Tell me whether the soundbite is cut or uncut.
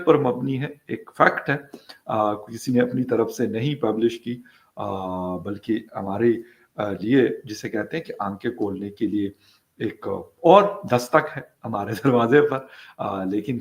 uncut